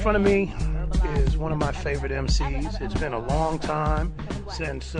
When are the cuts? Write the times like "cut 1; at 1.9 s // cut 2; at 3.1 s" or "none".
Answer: none